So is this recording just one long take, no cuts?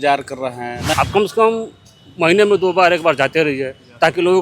no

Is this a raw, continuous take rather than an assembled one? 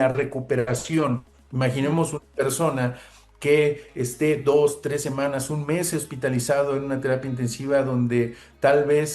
no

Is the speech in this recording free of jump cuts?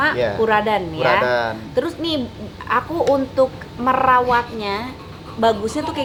yes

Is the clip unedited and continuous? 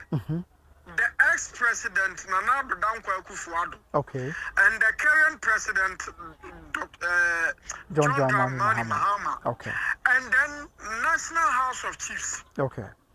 yes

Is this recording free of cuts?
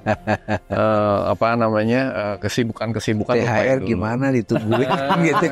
yes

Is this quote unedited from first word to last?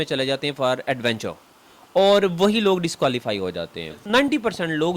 no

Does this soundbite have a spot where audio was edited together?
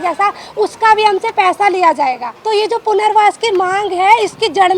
yes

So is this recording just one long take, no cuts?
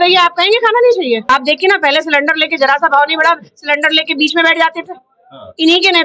no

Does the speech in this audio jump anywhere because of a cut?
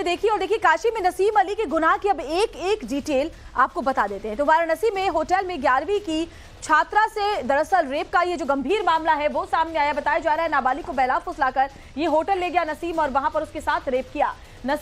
yes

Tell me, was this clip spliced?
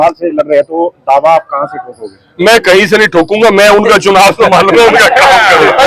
no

